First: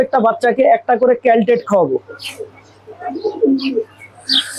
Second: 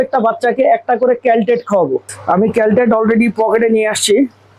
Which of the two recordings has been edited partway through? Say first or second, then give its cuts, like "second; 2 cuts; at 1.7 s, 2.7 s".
first; 1 cut; at 2.1 s